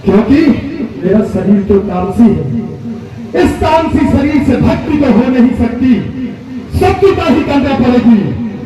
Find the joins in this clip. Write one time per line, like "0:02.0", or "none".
0:01.0